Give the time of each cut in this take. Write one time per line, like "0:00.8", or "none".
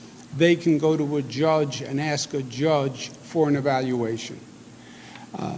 none